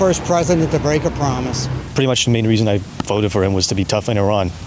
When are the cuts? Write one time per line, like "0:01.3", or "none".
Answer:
none